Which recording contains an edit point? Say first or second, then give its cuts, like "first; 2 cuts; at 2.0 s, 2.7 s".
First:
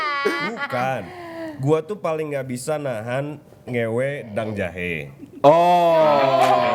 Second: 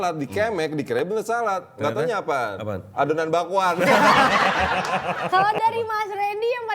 second; 1 cut; at 5.2 s